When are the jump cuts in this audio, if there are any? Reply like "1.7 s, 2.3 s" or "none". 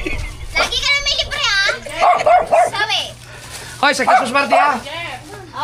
none